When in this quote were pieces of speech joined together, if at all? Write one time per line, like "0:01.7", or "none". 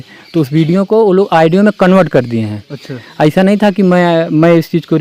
none